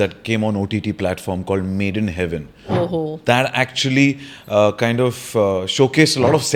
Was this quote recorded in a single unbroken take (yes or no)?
yes